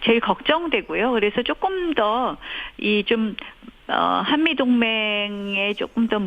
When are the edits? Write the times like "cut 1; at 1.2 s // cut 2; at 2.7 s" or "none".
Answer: cut 1; at 1.8 s